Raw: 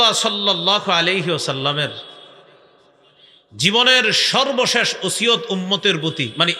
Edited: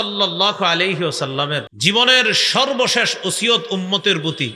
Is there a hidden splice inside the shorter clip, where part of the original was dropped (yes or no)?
yes